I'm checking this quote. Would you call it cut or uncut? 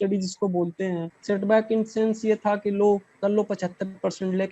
cut